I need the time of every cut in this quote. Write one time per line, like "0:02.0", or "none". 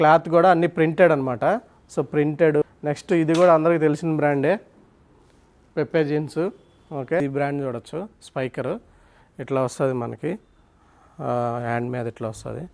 0:02.6
0:07.2